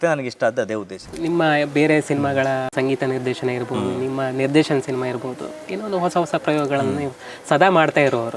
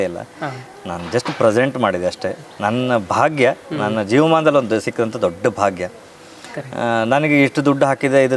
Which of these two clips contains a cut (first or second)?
first